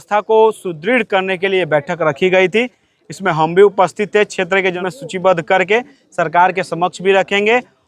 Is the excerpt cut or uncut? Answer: cut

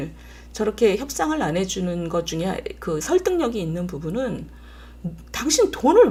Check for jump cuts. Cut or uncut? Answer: uncut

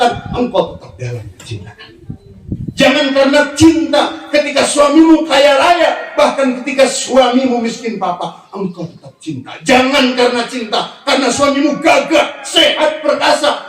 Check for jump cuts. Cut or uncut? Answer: uncut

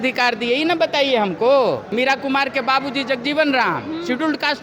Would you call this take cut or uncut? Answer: cut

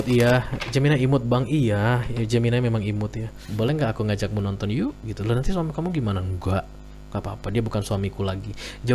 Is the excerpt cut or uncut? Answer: cut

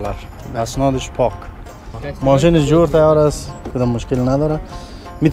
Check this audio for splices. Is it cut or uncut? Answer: cut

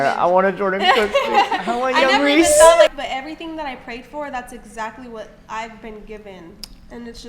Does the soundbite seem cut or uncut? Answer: cut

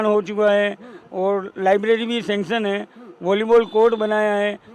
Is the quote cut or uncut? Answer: uncut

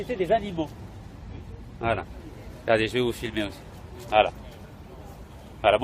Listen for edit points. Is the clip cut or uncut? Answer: cut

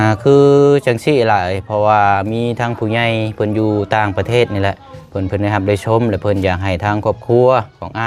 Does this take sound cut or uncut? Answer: uncut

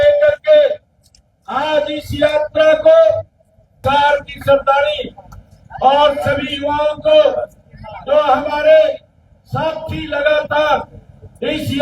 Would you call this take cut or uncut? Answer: cut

